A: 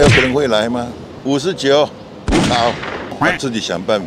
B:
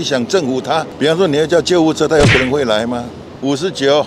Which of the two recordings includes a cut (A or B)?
A